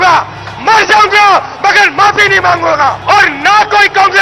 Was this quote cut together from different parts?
yes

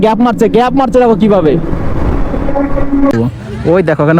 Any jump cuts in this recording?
yes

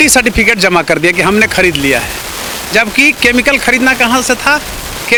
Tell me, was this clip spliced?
no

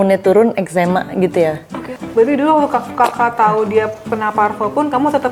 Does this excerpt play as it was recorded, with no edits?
no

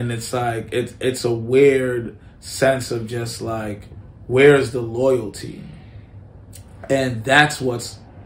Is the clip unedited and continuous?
yes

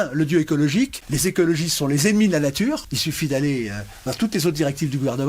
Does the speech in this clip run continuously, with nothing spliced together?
no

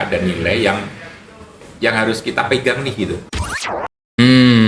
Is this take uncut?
no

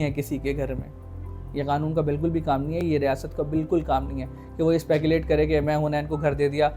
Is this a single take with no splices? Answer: yes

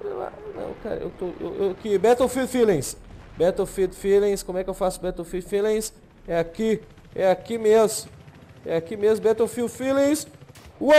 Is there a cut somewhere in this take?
no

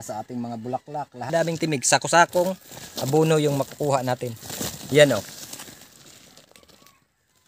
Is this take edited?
yes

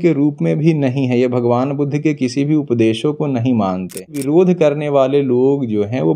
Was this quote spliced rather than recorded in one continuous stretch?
yes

